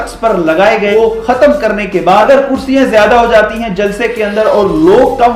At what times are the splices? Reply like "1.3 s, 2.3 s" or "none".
0.9 s, 2.3 s